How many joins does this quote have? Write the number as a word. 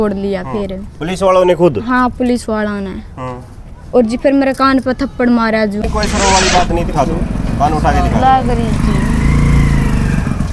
one